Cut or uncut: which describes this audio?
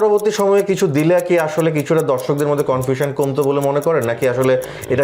uncut